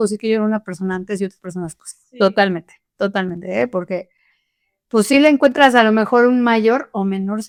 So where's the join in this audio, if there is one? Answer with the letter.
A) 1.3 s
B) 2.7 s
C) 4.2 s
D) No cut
D